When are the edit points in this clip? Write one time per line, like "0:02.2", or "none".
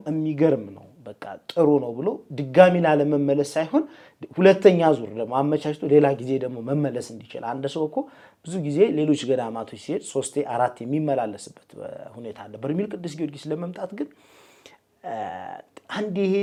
none

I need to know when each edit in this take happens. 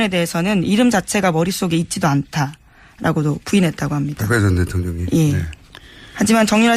0:01.9

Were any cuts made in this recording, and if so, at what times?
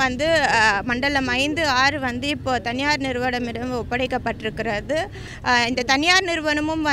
0:05.3

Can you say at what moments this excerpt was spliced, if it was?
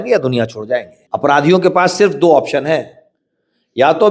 0:01.0

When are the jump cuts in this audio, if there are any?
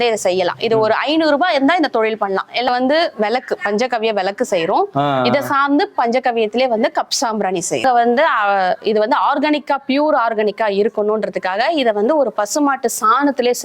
0:02.7
0:07.8

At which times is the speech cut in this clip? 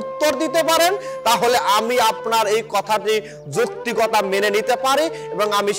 none

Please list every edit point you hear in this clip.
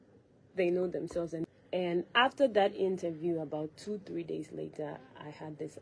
0:01.4

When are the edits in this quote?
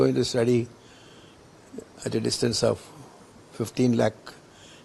none

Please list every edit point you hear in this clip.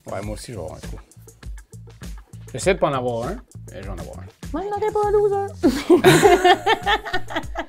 none

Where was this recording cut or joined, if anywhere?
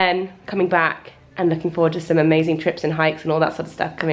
none

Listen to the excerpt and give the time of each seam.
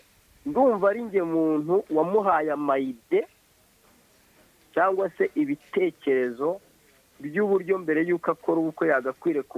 none

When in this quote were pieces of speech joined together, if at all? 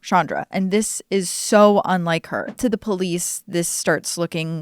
0:02.4

